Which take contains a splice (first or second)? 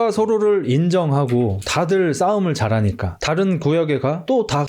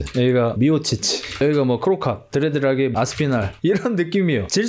second